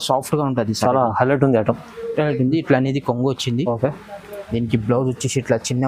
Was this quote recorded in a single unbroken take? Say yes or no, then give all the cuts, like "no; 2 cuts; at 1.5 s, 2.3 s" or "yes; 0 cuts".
yes; 0 cuts